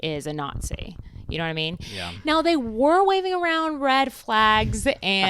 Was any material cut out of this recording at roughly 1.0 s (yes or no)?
no